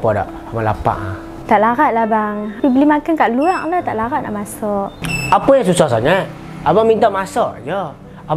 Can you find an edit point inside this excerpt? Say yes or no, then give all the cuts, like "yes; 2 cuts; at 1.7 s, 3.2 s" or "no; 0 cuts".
yes; 1 cut; at 2.4 s